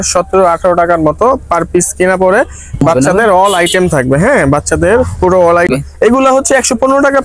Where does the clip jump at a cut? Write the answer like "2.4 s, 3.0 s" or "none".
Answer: 2.8 s, 5.7 s